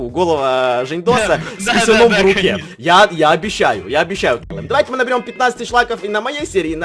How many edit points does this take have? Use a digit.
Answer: 1